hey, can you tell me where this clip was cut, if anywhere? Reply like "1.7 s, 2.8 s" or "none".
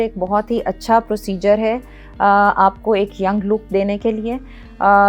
none